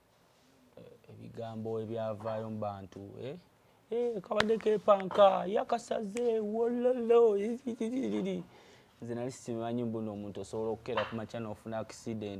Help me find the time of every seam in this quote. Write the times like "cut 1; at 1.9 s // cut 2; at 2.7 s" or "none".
none